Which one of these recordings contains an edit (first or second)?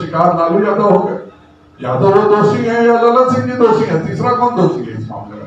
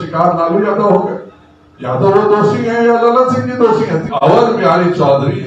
second